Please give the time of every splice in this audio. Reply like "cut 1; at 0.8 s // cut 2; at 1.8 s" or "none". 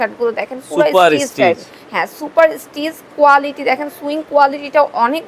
none